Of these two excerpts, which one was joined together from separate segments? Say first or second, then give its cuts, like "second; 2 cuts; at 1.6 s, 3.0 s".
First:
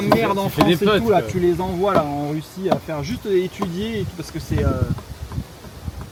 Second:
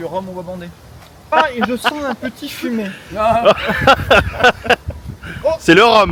second; 1 cut; at 1.3 s